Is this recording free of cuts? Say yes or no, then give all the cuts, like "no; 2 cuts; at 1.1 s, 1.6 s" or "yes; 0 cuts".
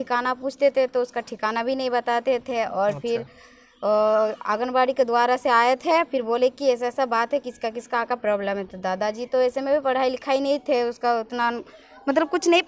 yes; 0 cuts